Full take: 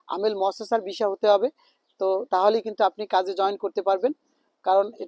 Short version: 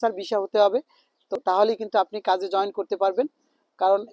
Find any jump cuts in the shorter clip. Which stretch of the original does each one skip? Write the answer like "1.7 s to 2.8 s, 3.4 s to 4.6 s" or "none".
2.0 s to 2.2 s